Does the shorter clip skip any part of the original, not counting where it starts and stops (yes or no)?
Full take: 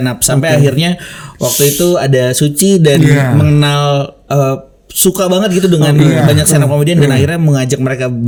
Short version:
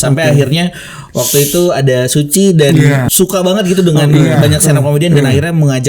yes